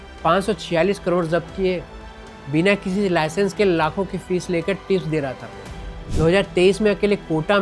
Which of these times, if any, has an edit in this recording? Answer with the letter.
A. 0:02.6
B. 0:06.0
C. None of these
B